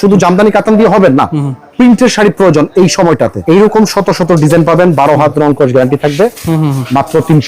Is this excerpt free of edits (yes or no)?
no